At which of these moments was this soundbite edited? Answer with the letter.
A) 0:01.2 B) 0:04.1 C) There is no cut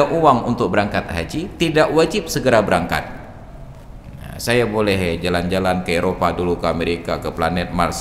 C